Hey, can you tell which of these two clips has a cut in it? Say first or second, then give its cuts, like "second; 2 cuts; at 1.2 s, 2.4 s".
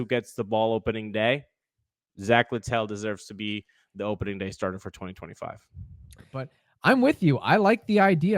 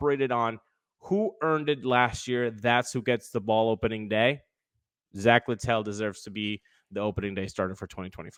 first; 1 cut; at 6.6 s